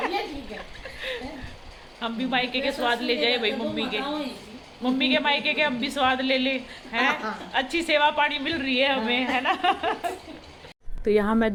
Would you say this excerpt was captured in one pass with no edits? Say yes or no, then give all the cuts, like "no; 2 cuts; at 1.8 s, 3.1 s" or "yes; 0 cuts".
yes; 0 cuts